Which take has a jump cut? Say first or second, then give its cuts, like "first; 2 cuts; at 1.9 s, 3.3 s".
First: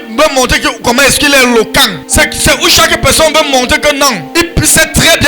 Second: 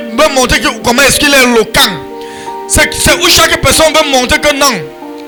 first; 2 cuts; at 2.0 s, 4.2 s